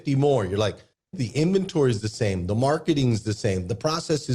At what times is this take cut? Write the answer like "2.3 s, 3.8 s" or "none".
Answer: 1.2 s